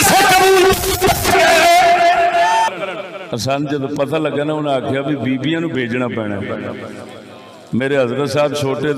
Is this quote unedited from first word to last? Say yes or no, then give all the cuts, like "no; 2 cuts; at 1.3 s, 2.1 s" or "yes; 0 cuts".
no; 1 cut; at 2.7 s